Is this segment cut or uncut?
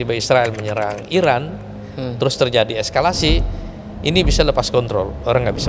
uncut